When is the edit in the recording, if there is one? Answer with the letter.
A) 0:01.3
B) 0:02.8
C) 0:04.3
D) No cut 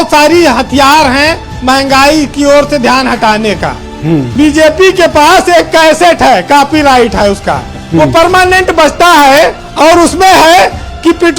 C